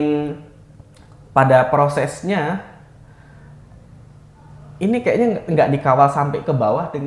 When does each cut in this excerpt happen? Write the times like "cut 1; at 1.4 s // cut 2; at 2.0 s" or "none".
none